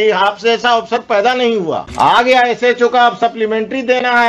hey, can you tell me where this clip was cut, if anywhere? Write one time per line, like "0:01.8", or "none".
0:01.9